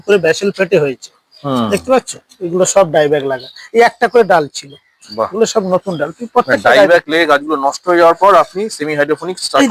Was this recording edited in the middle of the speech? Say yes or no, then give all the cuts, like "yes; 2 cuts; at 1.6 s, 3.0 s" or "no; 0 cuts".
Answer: no; 0 cuts